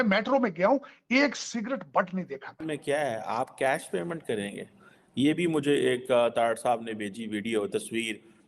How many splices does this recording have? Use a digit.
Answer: 1